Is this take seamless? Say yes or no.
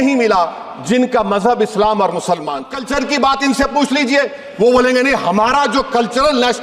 no